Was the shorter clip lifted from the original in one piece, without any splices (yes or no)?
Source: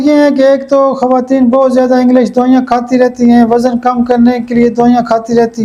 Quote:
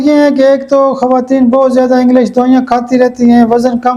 yes